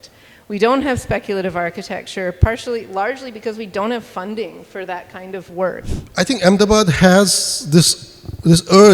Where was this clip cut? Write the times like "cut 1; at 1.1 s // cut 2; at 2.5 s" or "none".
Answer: cut 1; at 5.8 s